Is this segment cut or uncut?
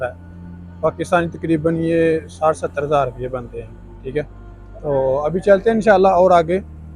uncut